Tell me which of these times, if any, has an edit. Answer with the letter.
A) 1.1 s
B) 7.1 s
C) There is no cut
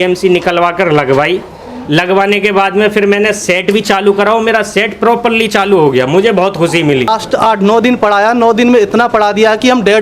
B